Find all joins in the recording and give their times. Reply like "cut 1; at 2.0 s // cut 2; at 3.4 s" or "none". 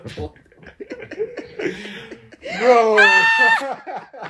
none